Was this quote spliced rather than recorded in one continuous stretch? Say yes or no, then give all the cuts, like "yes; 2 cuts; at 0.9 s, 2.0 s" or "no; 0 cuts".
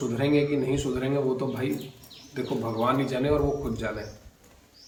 no; 0 cuts